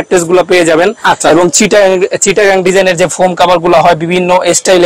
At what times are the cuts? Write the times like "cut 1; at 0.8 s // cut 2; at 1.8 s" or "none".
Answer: none